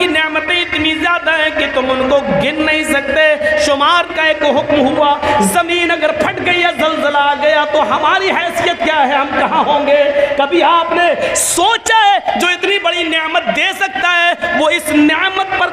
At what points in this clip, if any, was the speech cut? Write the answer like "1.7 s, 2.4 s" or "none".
4.1 s